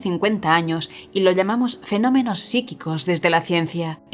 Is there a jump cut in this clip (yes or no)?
no